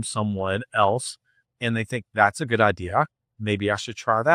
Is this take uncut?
yes; 0 cuts

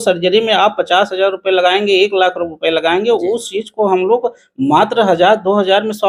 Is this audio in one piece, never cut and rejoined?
yes; 0 cuts

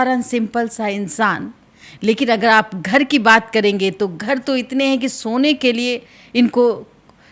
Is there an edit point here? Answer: no; 0 cuts

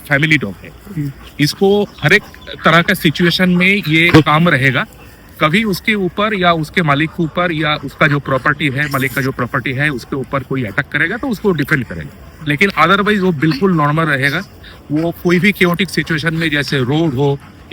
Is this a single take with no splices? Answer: yes; 0 cuts

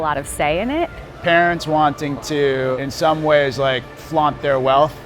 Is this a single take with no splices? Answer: no; 1 cut; at 1.0 s

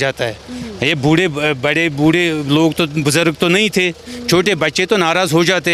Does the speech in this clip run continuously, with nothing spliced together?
yes; 0 cuts

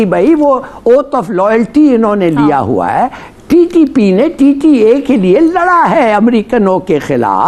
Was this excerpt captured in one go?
yes; 0 cuts

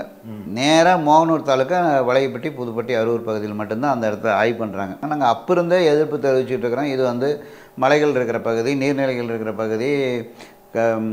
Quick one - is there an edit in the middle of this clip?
yes; 1 cut; at 5.0 s

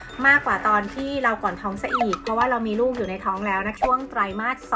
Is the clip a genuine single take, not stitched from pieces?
no; 1 cut; at 3.7 s

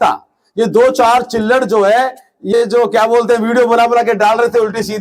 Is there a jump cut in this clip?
no; 0 cuts

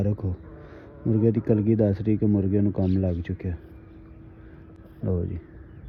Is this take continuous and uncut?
yes; 0 cuts

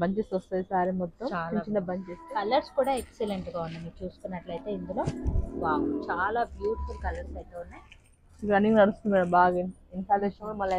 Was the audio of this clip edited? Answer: yes; 1 cut; at 2.1 s

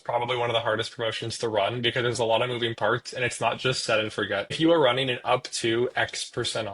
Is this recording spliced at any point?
yes; 1 cut; at 4.6 s

